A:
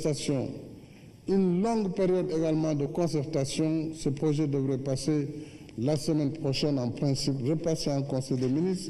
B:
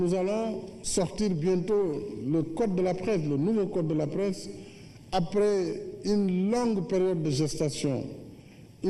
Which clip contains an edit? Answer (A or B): B